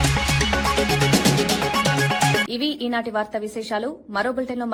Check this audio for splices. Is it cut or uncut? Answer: uncut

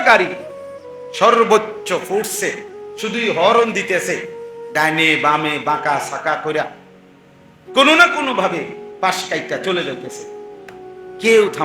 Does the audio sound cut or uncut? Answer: uncut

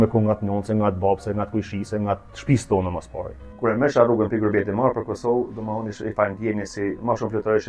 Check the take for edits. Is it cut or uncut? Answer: cut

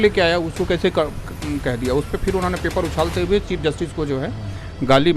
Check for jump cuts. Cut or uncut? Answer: uncut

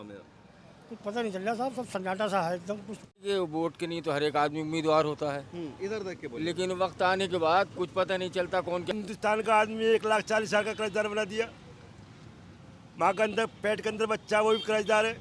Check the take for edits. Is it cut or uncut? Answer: cut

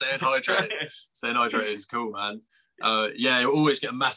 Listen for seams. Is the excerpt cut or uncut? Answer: uncut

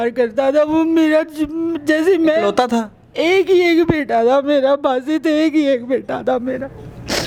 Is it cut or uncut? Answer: uncut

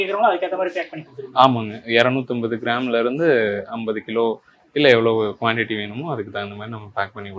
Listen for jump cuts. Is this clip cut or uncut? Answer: uncut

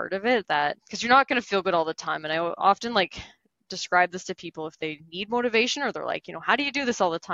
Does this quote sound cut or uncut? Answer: uncut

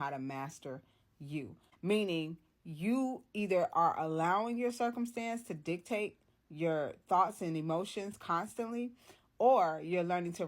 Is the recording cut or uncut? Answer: cut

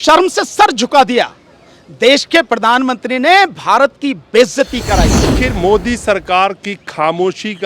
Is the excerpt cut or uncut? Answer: cut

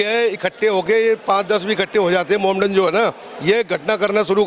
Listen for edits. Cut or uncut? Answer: uncut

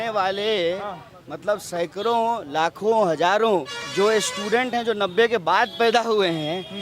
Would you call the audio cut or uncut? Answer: cut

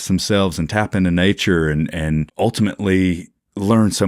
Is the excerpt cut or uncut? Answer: cut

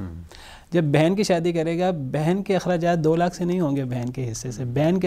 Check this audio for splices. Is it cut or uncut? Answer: uncut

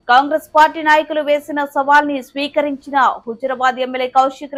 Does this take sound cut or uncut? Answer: uncut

